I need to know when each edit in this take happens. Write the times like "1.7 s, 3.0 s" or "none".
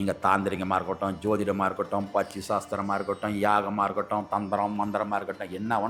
none